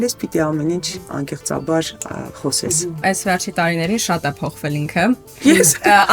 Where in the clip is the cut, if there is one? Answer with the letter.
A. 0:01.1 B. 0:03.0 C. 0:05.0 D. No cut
B